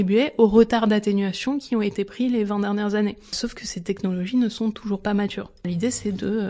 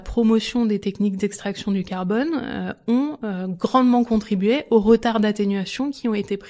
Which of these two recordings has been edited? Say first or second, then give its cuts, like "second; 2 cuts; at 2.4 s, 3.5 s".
first; 2 cuts; at 3.4 s, 5.7 s